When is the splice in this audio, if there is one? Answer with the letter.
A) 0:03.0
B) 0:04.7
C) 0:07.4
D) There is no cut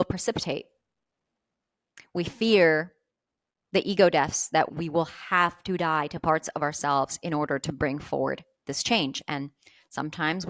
B